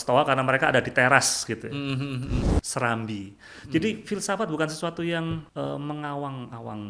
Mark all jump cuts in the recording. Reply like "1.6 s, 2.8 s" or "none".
2.5 s, 5.5 s